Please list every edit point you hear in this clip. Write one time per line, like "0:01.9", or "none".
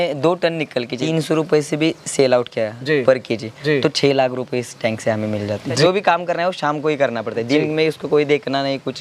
0:01.0
0:05.8